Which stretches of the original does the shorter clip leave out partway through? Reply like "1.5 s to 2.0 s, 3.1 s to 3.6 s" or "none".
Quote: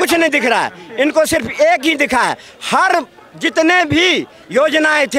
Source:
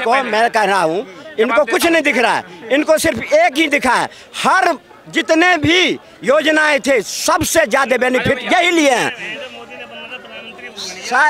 none